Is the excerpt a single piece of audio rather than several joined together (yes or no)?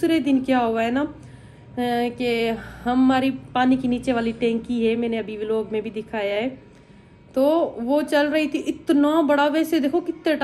yes